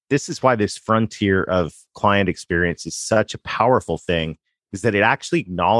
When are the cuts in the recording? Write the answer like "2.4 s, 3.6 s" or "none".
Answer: none